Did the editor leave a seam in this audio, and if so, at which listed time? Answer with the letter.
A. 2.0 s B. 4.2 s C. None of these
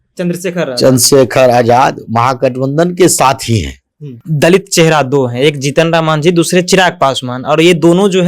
B